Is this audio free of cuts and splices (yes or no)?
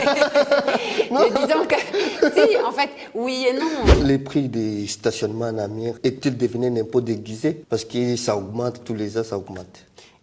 no